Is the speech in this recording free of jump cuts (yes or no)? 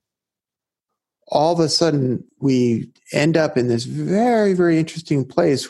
no